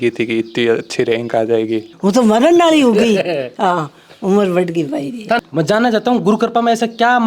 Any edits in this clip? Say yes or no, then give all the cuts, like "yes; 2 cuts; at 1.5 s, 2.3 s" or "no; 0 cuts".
yes; 2 cuts; at 1.9 s, 5.4 s